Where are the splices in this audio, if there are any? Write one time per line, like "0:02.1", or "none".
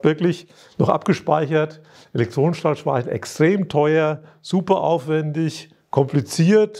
none